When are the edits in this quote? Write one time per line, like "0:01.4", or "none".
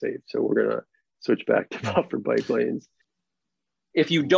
0:03.2